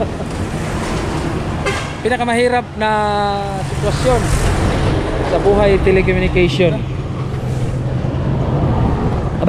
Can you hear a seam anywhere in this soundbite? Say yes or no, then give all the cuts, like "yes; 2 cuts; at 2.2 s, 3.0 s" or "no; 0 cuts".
no; 0 cuts